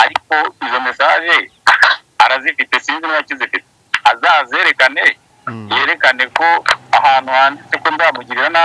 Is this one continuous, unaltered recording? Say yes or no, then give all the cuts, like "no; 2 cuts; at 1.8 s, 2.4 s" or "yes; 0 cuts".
yes; 0 cuts